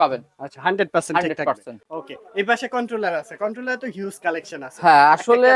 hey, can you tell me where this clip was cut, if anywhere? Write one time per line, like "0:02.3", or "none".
none